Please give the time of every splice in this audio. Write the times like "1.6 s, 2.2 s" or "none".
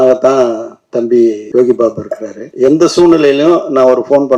1.4 s, 2.4 s